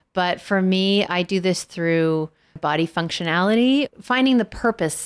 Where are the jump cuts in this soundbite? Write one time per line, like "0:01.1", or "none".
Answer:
0:02.6
0:03.9